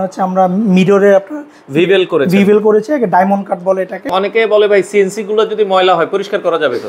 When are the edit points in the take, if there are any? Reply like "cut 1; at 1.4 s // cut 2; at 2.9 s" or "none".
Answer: cut 1; at 4.1 s